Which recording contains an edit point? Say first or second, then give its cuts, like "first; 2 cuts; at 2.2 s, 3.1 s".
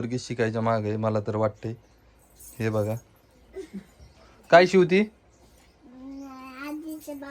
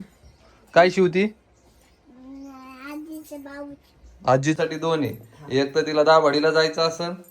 second; 1 cut; at 4.6 s